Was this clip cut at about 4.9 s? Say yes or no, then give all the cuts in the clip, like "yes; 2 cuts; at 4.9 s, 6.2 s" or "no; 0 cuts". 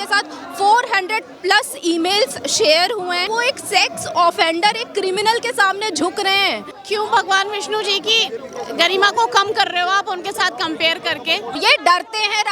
no; 3 cuts; at 3.3 s, 6.7 s, 11.5 s